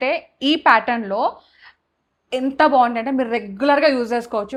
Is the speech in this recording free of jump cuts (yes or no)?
yes